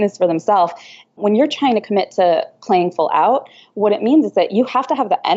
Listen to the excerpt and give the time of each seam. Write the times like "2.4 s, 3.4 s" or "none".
1.2 s